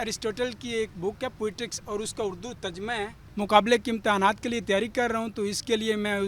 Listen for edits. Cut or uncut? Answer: uncut